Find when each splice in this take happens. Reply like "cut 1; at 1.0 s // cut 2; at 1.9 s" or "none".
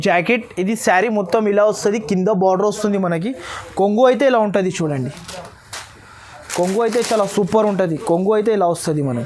none